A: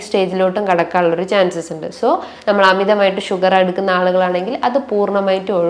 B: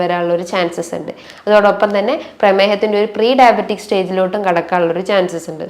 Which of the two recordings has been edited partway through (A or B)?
B